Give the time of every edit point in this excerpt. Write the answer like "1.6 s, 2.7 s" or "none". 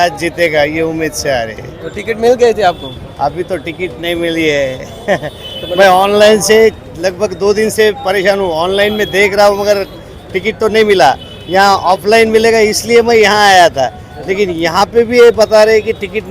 none